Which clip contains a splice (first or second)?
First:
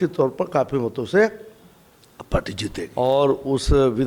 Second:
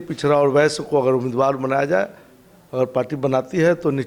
first